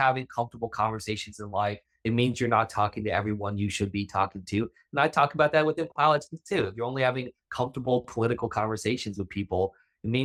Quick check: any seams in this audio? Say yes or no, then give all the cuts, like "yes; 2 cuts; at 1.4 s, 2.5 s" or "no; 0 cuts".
no; 0 cuts